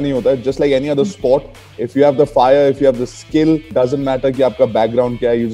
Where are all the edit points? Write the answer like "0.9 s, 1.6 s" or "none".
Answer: 3.7 s